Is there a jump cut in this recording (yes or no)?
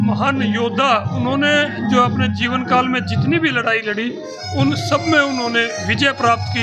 no